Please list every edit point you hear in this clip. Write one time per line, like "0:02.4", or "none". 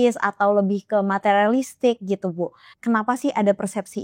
0:02.7